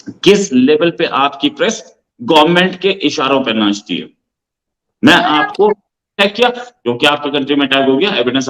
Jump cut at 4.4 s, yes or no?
no